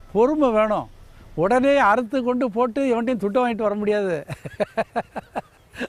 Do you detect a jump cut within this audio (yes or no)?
no